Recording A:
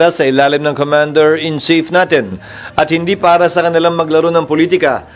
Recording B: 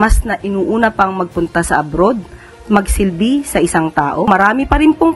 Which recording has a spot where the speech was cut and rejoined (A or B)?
B